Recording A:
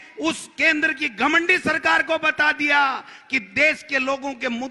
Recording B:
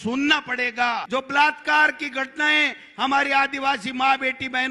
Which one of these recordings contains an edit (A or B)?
B